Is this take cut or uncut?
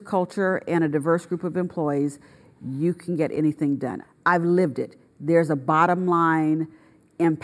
cut